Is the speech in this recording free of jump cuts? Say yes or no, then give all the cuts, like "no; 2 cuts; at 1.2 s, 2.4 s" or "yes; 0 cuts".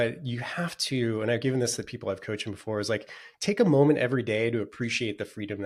yes; 0 cuts